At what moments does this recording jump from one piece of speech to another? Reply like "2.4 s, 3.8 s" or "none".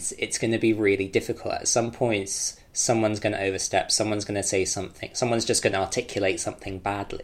none